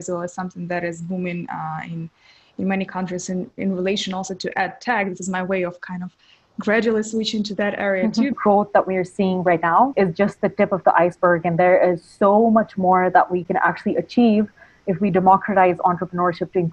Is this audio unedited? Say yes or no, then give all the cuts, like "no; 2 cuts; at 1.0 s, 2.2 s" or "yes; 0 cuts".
no; 3 cuts; at 8.4 s, 9.9 s, 13.8 s